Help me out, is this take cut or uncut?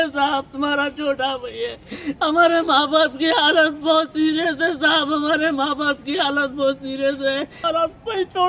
cut